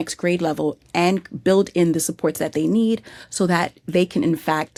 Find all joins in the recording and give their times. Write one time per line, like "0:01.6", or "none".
none

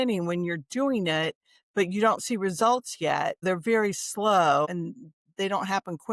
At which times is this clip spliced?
0:03.4
0:04.7

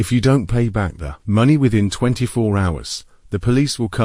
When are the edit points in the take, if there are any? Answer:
none

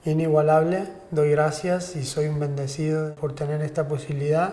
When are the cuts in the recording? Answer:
0:03.1

